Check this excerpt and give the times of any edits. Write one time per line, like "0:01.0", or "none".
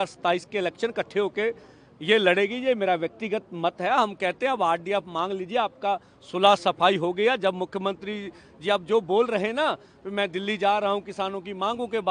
none